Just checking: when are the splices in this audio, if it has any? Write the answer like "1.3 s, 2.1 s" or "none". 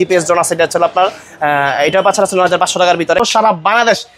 3.2 s